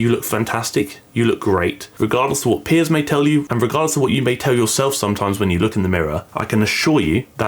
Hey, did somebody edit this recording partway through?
yes; 1 cut; at 1.8 s

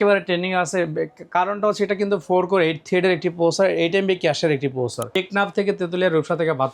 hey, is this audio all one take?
no; 1 cut; at 5.2 s

